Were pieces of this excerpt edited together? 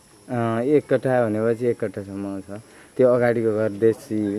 no; 0 cuts

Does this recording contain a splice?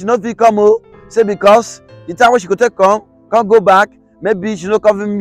no; 0 cuts

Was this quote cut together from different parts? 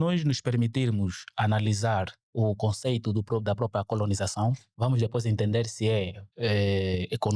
yes; 2 cuts; at 4.7 s, 6.2 s

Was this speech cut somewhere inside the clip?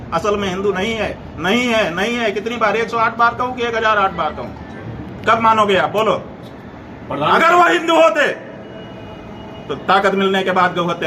no; 0 cuts

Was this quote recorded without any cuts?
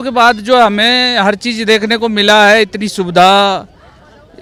yes; 0 cuts

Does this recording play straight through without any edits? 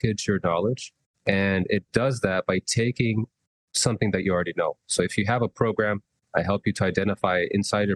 yes; 0 cuts

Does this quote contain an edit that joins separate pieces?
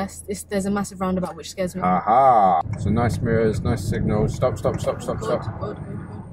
yes; 1 cut; at 2.7 s

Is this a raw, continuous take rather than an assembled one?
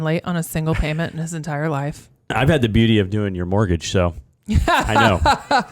no; 1 cut; at 2.3 s

